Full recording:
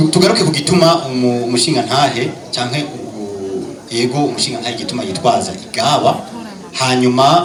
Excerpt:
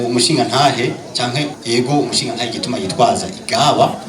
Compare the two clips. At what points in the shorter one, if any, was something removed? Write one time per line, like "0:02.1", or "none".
0:01.6